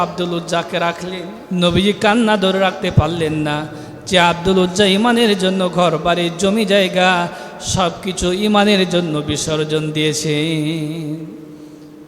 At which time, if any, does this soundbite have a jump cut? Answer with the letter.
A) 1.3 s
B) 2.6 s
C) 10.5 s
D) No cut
A